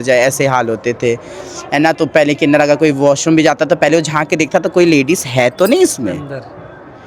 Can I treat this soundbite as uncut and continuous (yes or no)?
yes